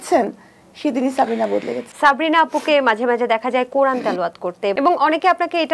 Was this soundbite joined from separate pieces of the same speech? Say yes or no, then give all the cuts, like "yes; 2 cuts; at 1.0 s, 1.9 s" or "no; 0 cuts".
yes; 2 cuts; at 1.9 s, 4.7 s